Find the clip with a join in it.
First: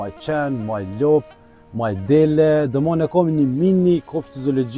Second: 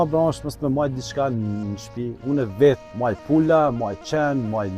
second; 1 cut; at 2.9 s

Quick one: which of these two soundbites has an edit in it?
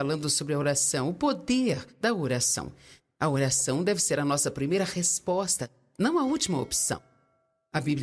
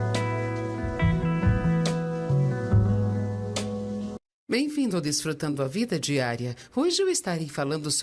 second; 1 cut; at 4.3 s

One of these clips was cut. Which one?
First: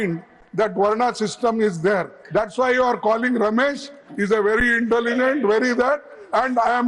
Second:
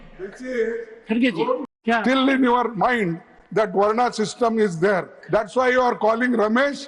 second; 1 cut; at 1.7 s

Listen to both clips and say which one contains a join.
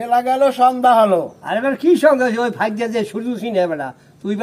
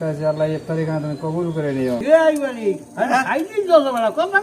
second; 1 cut; at 2.0 s

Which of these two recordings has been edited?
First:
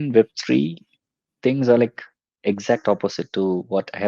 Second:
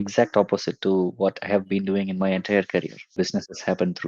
second; 1 cut; at 3.1 s

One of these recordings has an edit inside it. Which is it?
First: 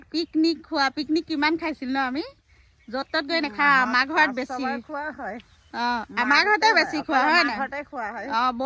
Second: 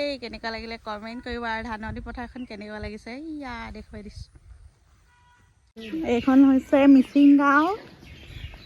second; 1 cut; at 5.8 s

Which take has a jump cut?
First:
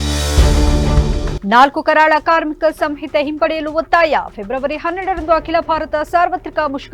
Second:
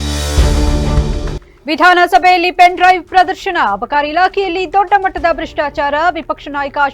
second; 1 cut; at 1.3 s

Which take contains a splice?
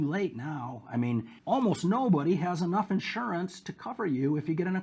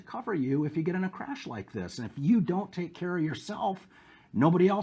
first; 1 cut; at 1.3 s

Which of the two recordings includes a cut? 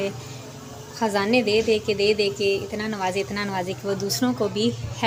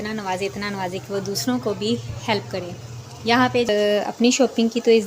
second; 1 cut; at 3.7 s

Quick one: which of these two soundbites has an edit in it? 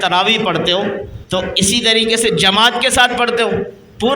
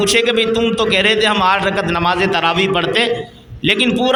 first; 1 cut; at 1.1 s

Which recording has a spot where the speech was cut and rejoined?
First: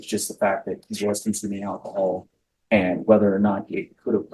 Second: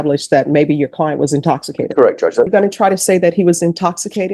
second; 1 cut; at 2.5 s

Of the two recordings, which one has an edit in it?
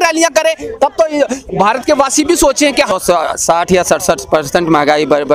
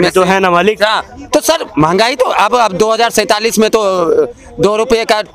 first; 1 cut; at 2.9 s

